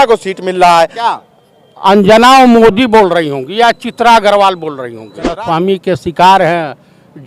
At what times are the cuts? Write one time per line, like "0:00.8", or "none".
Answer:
0:01.0
0:05.3